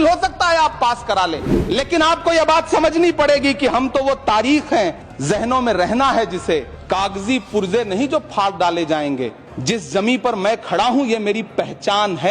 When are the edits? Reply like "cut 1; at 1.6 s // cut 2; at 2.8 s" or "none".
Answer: cut 1; at 1.5 s // cut 2; at 5.1 s // cut 3; at 6.7 s // cut 4; at 9.5 s